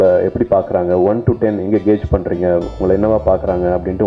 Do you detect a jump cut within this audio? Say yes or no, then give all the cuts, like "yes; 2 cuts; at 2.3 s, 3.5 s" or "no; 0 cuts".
no; 0 cuts